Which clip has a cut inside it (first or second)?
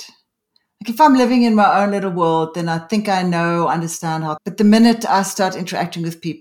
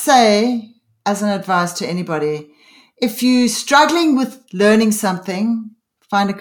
first